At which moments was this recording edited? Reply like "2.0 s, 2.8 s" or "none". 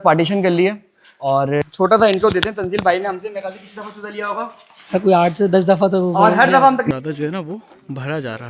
1.6 s, 6.9 s